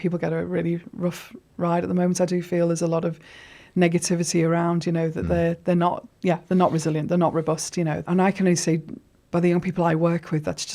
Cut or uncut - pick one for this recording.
cut